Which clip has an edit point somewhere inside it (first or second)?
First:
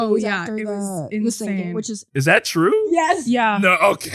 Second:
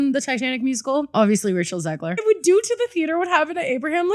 second